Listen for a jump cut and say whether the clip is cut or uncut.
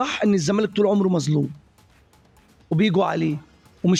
uncut